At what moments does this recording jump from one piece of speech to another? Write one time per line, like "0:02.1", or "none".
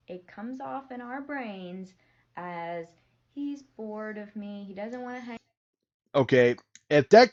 none